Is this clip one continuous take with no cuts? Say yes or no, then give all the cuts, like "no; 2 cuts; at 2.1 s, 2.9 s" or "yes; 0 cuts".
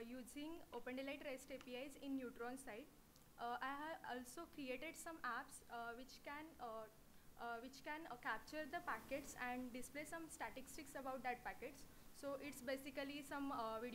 no; 1 cut; at 4.0 s